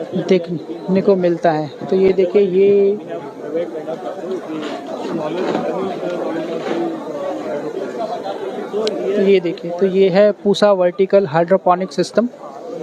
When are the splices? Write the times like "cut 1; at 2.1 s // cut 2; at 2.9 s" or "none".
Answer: none